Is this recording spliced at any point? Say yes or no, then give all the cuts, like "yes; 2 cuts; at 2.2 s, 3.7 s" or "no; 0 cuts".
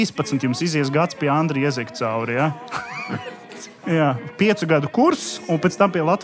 yes; 1 cut; at 3.9 s